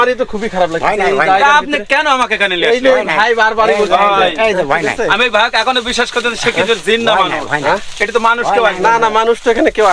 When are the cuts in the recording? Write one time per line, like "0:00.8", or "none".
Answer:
none